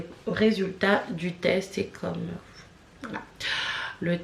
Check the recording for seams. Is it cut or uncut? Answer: uncut